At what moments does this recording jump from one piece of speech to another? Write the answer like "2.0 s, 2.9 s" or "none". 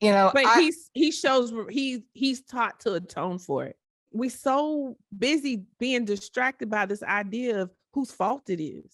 4.1 s